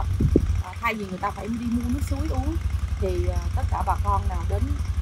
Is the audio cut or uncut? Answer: uncut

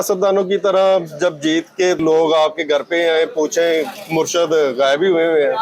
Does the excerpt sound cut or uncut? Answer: cut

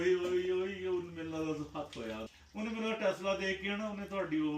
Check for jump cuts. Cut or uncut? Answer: cut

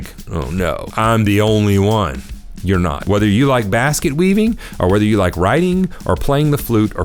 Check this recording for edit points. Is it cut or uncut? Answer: cut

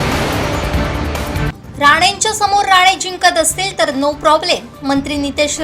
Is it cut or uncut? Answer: cut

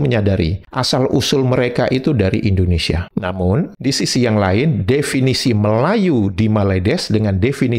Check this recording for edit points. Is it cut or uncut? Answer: uncut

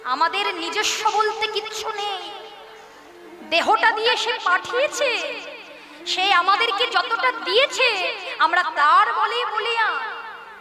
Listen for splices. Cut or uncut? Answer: uncut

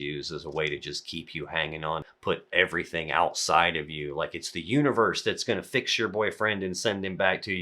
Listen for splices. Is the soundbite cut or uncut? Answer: cut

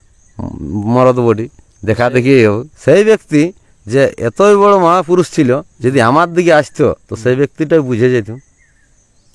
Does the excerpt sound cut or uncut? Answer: cut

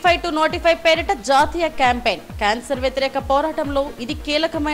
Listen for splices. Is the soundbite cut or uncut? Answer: uncut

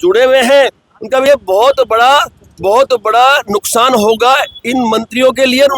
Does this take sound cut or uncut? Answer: cut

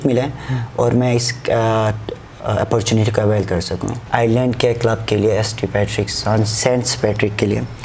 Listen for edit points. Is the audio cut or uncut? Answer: cut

